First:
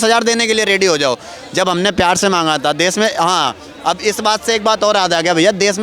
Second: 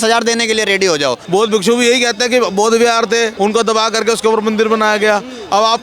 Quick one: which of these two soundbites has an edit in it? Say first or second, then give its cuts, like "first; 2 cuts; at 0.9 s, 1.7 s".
second; 2 cuts; at 1.2 s, 3.3 s